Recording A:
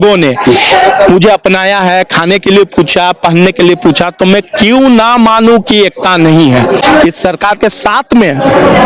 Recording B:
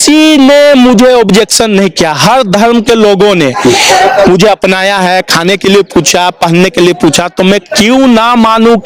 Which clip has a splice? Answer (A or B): A